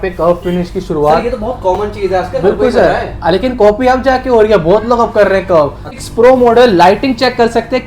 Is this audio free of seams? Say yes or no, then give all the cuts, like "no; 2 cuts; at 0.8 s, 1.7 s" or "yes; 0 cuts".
no; 1 cut; at 5.9 s